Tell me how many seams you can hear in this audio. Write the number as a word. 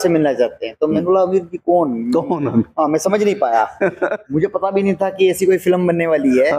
one